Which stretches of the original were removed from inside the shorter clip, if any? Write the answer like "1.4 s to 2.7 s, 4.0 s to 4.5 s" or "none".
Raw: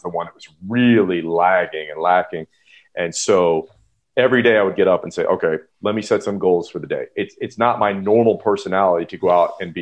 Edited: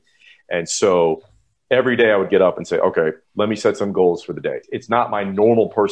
7.1 s to 7.3 s